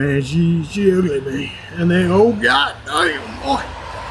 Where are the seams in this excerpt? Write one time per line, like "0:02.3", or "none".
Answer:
none